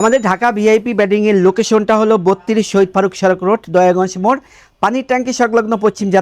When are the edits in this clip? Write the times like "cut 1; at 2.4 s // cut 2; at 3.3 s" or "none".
none